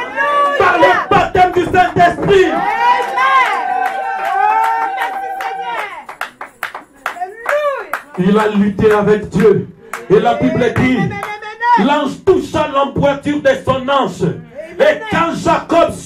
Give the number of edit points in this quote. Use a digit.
0